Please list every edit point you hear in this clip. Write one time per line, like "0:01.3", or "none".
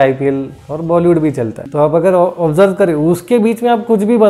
0:01.6